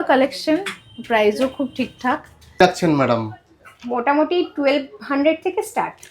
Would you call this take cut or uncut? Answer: cut